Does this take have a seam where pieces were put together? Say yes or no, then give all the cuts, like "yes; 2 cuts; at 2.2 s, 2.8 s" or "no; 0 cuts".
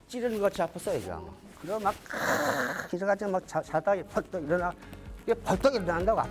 no; 0 cuts